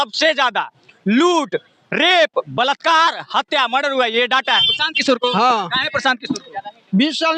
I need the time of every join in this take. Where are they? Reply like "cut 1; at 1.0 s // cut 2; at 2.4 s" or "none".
cut 1; at 4.7 s